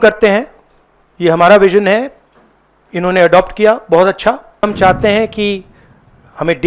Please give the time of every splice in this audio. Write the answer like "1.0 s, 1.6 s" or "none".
4.6 s